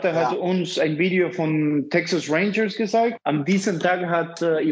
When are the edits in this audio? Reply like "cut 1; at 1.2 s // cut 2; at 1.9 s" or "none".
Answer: cut 1; at 3.2 s